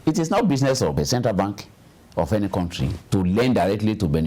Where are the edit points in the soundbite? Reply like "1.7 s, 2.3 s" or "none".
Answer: 0.9 s